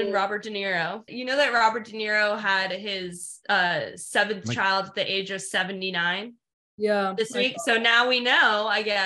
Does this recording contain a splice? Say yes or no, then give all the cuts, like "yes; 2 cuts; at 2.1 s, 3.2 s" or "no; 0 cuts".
yes; 1 cut; at 1.1 s